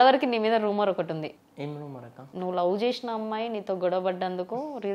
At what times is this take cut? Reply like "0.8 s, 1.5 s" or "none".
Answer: 2.3 s